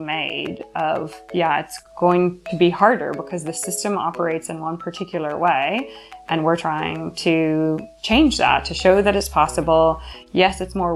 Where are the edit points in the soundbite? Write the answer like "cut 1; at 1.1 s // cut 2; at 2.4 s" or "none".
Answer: none